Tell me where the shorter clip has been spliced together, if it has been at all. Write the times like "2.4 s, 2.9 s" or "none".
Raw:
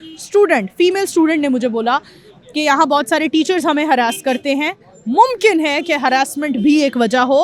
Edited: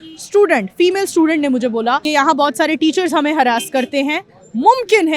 2.0 s